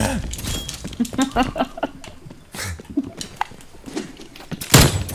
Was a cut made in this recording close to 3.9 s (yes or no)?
yes